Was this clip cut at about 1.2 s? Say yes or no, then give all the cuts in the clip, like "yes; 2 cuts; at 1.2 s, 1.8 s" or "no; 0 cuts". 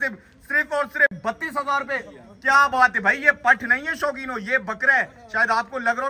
no; 0 cuts